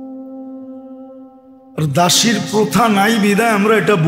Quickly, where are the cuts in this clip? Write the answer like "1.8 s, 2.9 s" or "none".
1.6 s